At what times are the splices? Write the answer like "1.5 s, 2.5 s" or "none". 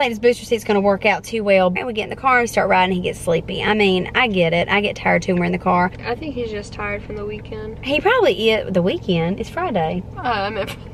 1.8 s, 6.0 s